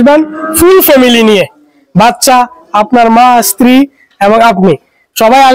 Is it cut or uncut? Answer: uncut